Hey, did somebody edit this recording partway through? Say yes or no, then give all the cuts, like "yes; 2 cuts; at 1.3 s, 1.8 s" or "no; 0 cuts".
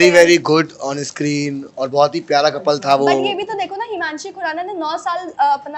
no; 0 cuts